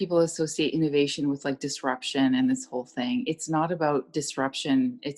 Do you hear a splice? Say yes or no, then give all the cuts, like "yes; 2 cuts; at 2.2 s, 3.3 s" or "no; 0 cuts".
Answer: no; 0 cuts